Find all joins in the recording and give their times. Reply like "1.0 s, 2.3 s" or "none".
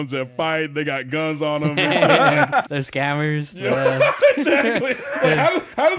2.7 s